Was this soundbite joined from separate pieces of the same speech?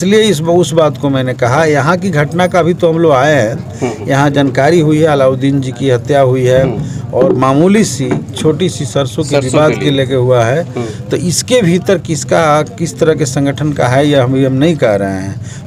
no; 0 cuts

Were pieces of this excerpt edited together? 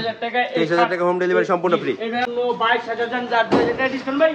yes; 1 cut; at 2.3 s

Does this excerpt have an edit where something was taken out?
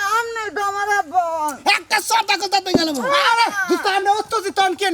no; 0 cuts

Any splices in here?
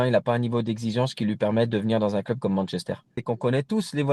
yes; 1 cut; at 3.2 s

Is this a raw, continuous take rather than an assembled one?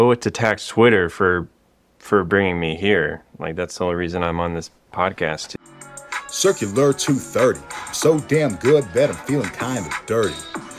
no; 1 cut; at 5.5 s

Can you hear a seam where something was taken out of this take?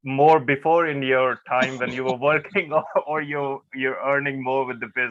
no; 0 cuts

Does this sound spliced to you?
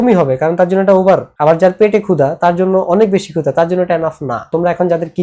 yes; 2 cuts; at 1.3 s, 4.5 s

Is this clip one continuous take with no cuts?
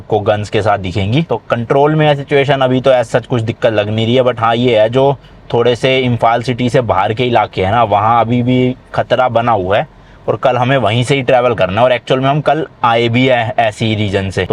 yes; 0 cuts

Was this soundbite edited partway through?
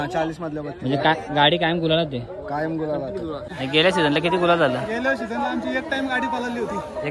yes; 1 cut; at 3.5 s

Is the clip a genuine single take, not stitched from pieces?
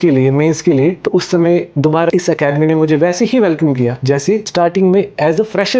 no; 3 cuts; at 1.0 s, 2.1 s, 4.3 s

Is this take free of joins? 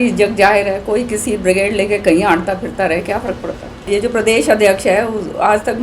no; 1 cut; at 3.9 s

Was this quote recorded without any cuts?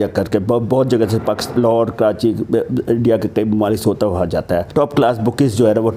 no; 1 cut; at 4.7 s

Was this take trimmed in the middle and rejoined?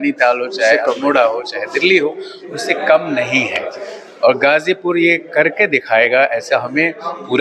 no; 0 cuts

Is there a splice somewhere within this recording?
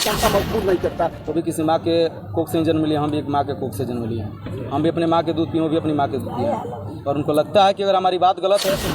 yes; 1 cut; at 1.2 s

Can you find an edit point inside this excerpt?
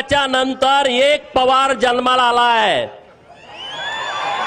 no; 0 cuts

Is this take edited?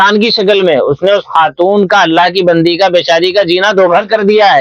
no; 0 cuts

